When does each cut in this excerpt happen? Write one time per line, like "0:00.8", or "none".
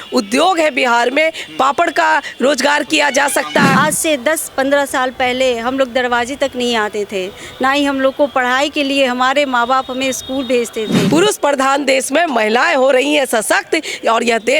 0:03.7
0:11.0